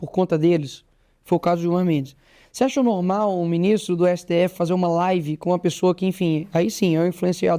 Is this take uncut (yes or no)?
yes